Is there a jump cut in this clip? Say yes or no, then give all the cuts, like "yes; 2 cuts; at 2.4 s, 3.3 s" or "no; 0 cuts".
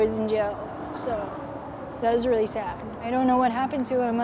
yes; 1 cut; at 3.1 s